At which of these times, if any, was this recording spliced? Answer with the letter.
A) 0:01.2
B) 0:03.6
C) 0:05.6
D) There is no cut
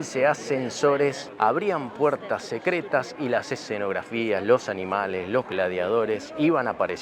A